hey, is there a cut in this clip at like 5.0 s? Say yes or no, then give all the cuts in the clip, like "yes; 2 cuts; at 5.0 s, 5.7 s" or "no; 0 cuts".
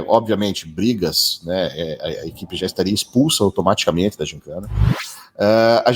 yes; 1 cut; at 5.0 s